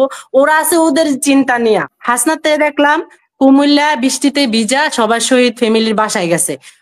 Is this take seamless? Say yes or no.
no